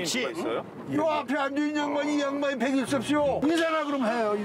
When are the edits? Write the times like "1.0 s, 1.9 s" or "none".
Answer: 3.4 s